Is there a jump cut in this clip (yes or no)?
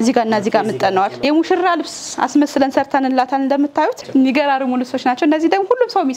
yes